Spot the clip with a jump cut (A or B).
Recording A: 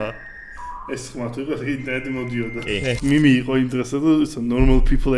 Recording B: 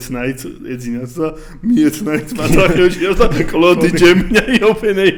A